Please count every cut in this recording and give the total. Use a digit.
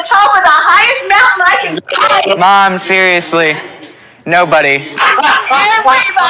1